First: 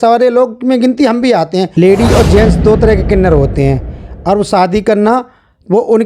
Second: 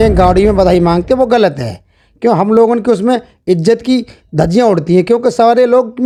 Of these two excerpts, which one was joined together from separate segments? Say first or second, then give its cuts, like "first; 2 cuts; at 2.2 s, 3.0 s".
first; 1 cut; at 1.7 s